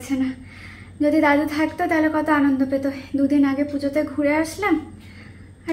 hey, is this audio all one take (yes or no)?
yes